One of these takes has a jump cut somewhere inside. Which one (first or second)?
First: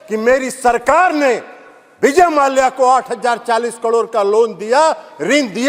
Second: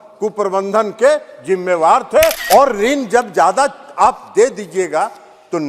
second